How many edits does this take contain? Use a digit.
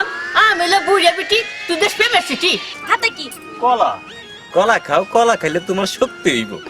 1